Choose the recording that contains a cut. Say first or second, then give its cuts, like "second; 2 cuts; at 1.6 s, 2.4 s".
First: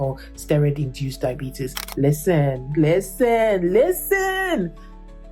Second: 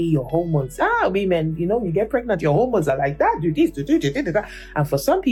first; 1 cut; at 1.8 s